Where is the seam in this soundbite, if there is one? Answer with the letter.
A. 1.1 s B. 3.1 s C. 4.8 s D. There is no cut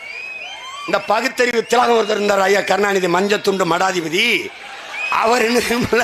D